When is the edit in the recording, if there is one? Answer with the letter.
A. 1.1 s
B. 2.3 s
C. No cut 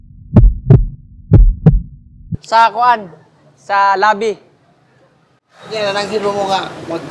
B